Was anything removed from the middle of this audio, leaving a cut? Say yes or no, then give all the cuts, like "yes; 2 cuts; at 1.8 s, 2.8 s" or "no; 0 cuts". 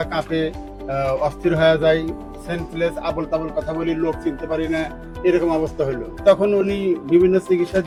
no; 0 cuts